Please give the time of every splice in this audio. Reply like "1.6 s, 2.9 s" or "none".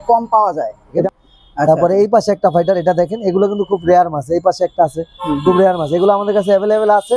1.1 s